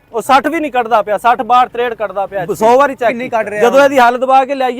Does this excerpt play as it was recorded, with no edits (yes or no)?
no